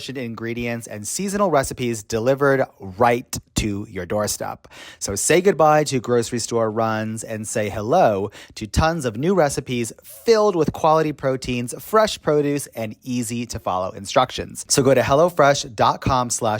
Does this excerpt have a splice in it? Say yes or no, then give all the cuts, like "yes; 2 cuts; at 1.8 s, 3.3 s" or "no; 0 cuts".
yes; 1 cut; at 14.6 s